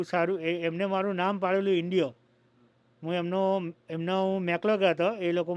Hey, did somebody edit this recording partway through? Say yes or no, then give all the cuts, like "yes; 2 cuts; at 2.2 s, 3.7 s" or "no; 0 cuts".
no; 0 cuts